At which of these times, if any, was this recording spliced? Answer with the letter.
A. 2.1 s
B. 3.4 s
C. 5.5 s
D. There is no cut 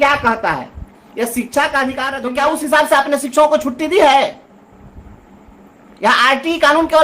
A